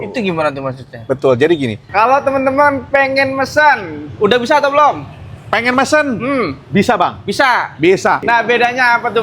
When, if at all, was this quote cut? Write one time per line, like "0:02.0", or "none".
0:01.8
0:08.2